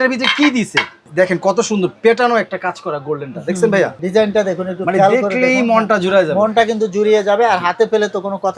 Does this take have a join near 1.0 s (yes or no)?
yes